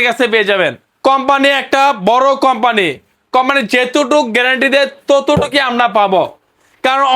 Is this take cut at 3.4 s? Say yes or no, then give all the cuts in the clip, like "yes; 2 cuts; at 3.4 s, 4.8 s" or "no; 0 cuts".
no; 1 cut; at 0.9 s